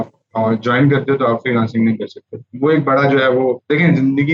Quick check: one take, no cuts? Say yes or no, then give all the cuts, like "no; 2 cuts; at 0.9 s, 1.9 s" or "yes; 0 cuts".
yes; 0 cuts